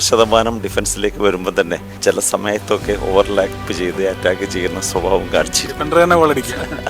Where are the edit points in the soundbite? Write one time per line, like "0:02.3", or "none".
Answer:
0:01.9